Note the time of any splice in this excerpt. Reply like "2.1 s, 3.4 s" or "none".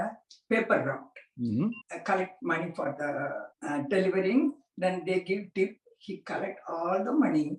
1.8 s, 3.5 s